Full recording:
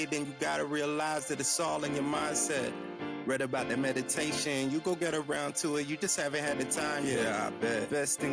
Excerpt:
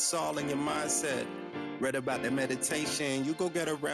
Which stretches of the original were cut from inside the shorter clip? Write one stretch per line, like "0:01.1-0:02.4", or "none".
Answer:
none

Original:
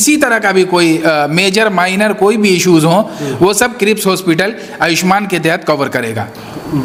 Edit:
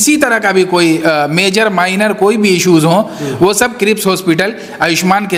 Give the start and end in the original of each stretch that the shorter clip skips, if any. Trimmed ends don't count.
none

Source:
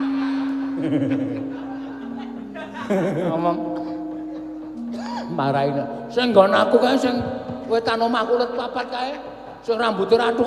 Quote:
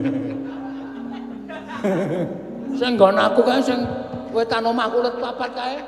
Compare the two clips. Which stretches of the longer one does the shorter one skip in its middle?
0:03.4-0:05.7

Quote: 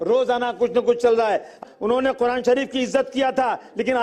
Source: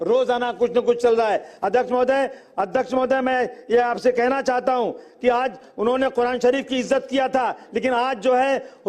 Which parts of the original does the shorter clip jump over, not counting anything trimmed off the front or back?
0:01.6-0:05.5

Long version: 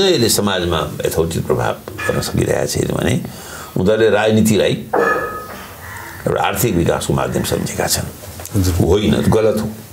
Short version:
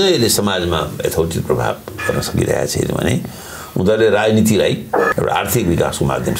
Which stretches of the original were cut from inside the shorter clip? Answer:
0:05.1-0:06.2

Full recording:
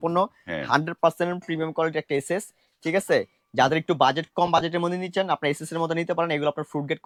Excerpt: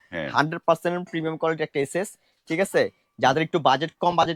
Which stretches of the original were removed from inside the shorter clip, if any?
none

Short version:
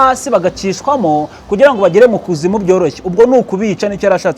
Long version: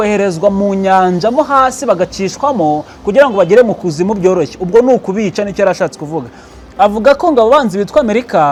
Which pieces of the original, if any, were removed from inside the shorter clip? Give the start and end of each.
none

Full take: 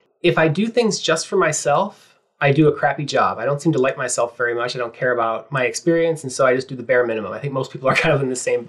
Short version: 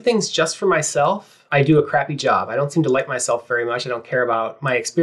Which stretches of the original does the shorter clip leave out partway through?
0:02.0-0:02.2

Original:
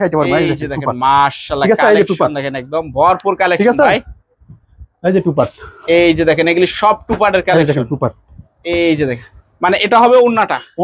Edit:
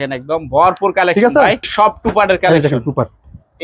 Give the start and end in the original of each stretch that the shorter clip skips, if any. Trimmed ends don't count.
0:04.1-0:06.7

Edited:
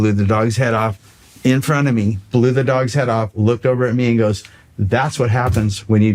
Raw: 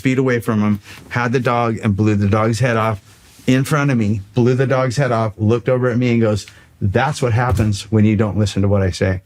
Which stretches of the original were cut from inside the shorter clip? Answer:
none

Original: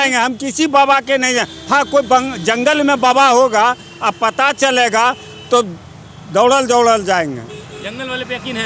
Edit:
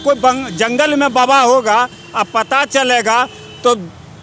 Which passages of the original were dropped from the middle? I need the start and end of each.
none

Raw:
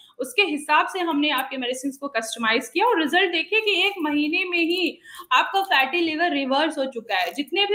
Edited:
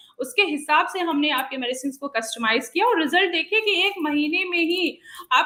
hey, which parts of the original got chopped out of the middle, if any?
none

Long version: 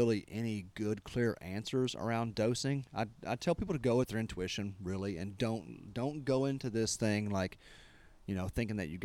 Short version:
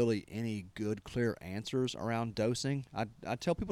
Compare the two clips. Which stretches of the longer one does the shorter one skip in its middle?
none

